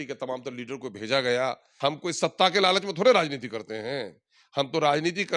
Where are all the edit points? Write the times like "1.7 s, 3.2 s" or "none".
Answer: 1.7 s

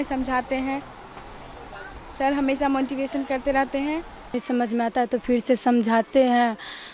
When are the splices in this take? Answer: 4.3 s

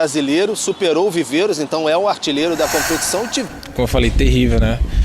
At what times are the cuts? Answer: 3.5 s

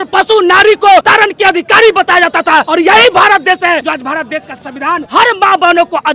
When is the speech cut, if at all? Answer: 1.1 s, 2.7 s, 3.8 s, 5.1 s

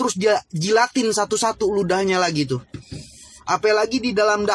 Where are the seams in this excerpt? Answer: none

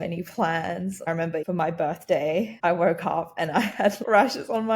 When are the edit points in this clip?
1.0 s, 2.5 s, 4.0 s

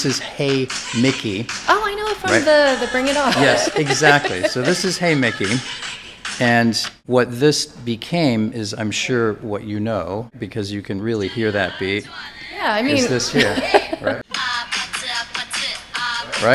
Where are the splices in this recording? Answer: 14.1 s

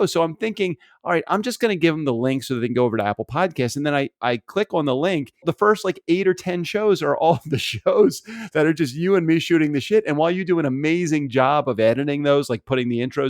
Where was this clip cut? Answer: 5.4 s

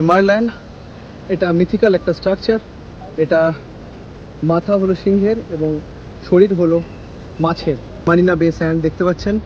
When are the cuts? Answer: 8.1 s

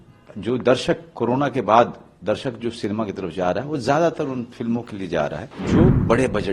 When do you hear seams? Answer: 5.5 s

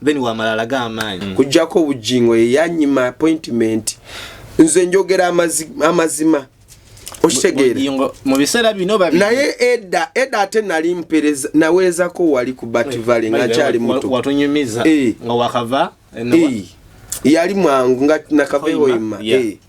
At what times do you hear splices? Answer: 1.2 s

